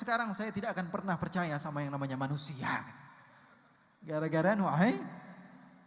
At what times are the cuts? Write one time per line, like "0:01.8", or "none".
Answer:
none

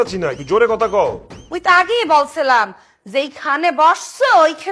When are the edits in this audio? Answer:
none

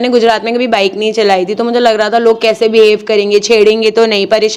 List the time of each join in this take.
none

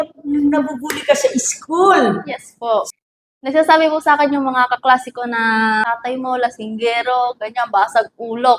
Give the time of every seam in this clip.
0:02.9
0:05.8

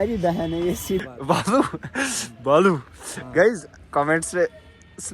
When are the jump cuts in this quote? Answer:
0:01.0

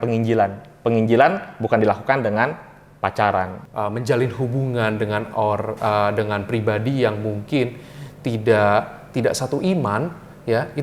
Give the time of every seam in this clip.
0:03.6

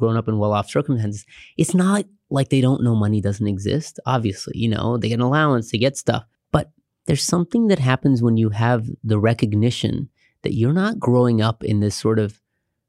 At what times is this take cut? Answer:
0:06.3

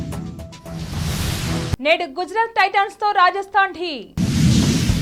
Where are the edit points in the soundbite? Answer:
none

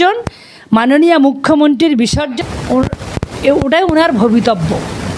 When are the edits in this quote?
0:02.3

